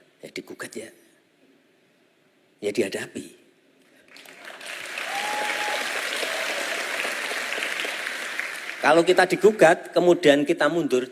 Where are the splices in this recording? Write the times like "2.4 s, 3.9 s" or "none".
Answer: none

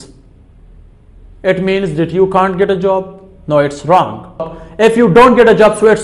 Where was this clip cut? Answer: 4.6 s

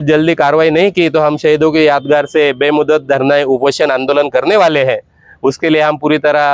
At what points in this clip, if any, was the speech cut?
none

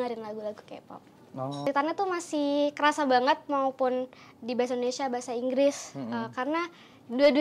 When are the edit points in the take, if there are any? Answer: 1.7 s

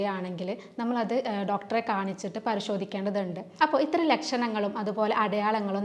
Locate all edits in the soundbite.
3.4 s

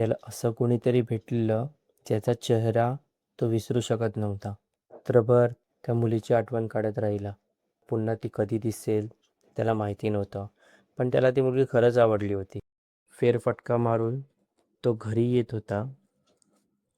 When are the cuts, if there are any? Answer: 12.9 s

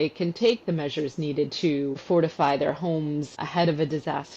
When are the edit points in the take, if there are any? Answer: 2.0 s, 3.4 s

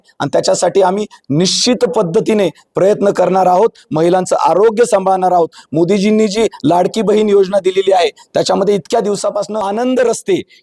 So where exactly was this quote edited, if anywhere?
9.7 s

